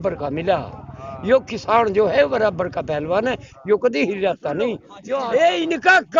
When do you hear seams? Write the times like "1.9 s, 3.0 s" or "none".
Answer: 4.9 s